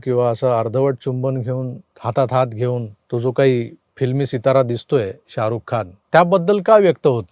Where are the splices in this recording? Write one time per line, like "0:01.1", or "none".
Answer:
none